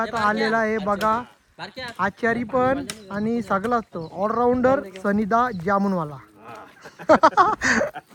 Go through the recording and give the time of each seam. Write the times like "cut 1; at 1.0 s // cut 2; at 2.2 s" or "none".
none